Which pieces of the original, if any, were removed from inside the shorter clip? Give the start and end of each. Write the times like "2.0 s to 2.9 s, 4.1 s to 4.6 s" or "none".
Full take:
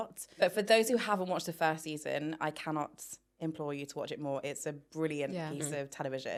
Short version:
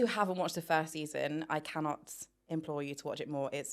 none